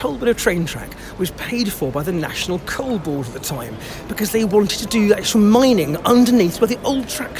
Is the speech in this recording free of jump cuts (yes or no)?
yes